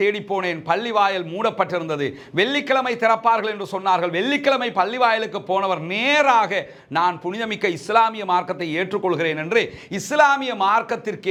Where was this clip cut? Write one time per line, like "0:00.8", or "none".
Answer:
none